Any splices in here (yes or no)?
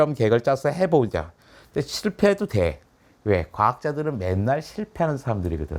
no